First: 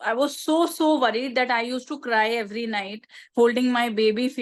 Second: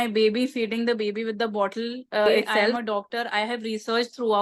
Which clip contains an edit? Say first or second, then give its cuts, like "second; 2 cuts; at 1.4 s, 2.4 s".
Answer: second; 1 cut; at 2.5 s